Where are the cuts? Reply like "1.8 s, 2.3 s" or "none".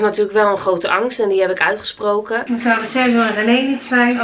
2.4 s